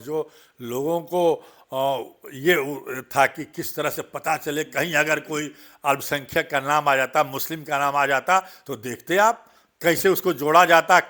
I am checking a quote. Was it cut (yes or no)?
no